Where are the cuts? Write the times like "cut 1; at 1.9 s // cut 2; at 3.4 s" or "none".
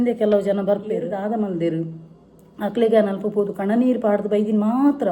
cut 1; at 1.1 s